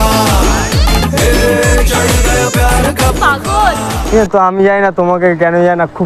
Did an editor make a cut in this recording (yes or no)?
no